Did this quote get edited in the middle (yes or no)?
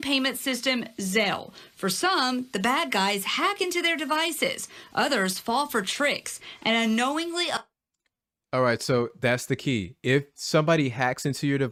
no